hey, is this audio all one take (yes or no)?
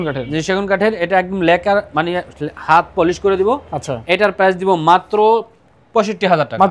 yes